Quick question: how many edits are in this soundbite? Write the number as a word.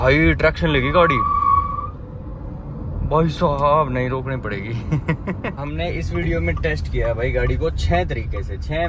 one